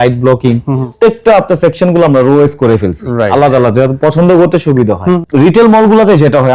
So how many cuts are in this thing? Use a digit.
2